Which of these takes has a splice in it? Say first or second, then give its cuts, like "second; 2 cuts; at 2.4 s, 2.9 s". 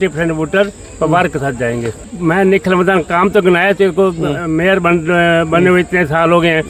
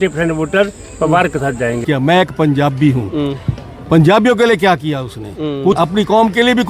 second; 2 cuts; at 1.8 s, 5.8 s